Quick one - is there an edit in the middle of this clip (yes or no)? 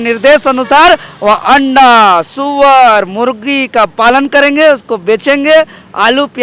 no